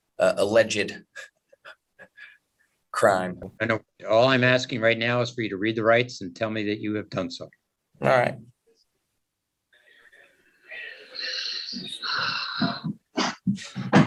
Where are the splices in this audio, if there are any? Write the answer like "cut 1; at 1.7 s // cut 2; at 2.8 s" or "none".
none